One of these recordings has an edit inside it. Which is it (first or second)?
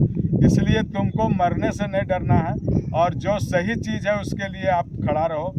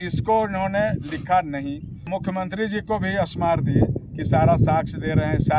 second